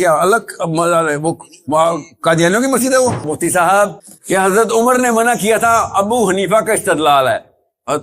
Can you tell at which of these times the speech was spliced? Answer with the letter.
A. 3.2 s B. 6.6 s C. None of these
A